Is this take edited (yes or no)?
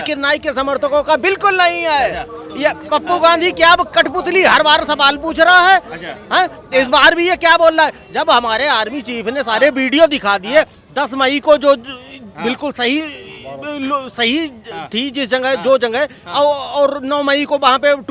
no